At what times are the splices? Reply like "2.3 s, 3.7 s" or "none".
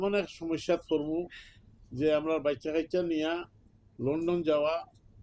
none